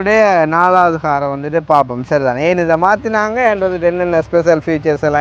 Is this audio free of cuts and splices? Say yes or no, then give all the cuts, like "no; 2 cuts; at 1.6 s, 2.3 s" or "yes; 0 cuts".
yes; 0 cuts